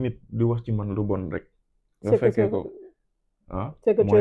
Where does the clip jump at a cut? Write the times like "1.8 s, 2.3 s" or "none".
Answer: none